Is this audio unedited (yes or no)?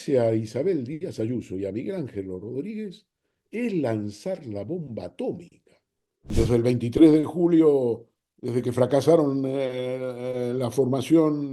no